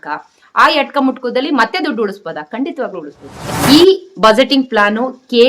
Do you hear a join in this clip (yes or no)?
yes